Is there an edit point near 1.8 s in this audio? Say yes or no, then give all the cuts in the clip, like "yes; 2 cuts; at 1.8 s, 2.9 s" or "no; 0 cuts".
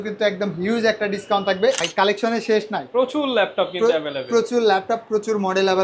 yes; 1 cut; at 1.8 s